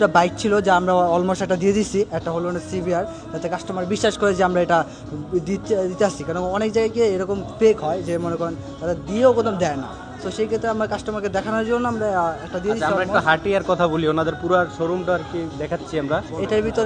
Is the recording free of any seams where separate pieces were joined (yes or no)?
yes